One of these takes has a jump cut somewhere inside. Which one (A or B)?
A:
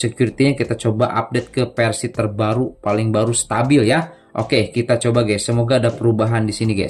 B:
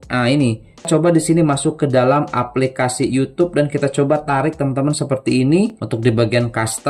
B